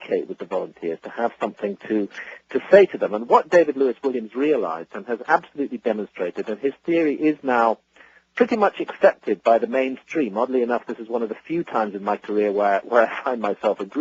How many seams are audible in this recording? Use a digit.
1